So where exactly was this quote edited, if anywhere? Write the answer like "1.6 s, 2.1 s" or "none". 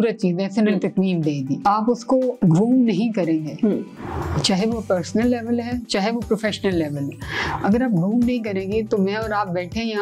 1.7 s